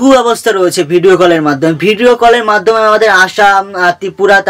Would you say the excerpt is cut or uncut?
uncut